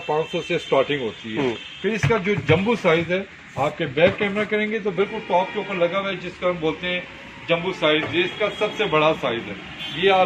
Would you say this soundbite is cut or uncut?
uncut